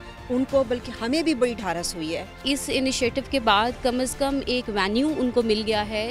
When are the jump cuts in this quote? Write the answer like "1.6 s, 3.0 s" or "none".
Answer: 2.4 s